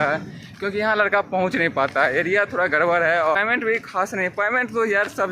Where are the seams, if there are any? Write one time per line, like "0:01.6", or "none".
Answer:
0:03.4